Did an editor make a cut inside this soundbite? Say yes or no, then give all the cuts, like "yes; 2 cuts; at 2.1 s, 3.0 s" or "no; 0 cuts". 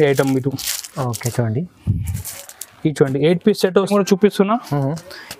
yes; 1 cut; at 3.9 s